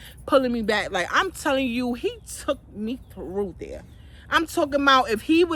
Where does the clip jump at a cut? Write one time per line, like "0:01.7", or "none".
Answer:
none